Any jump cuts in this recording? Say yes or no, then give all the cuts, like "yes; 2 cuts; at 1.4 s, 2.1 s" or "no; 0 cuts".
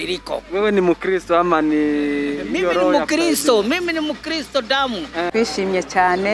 yes; 1 cut; at 5.3 s